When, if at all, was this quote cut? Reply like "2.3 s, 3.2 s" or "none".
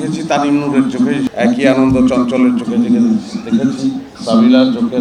1.3 s, 4.1 s